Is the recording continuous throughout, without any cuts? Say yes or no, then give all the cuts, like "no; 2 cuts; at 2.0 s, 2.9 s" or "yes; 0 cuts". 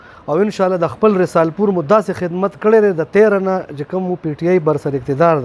yes; 0 cuts